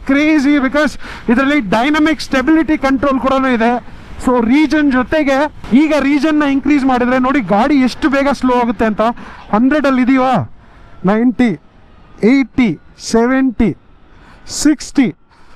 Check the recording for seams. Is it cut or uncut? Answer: uncut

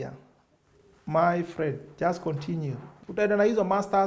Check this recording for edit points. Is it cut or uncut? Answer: cut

